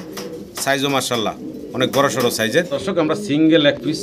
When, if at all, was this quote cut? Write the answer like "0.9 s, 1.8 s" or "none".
2.7 s